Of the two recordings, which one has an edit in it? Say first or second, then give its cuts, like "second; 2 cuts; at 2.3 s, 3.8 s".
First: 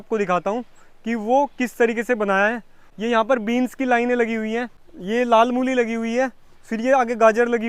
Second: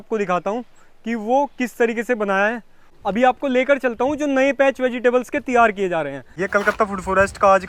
second; 2 cuts; at 2.8 s, 6.3 s